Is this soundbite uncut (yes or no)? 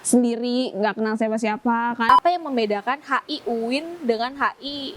no